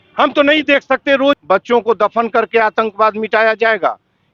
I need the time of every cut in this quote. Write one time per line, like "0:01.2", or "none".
0:01.4